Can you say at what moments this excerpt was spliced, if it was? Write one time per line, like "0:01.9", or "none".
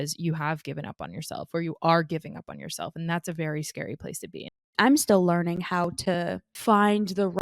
0:04.7
0:06.5